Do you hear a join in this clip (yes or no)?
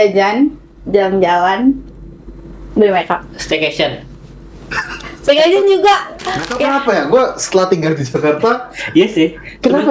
yes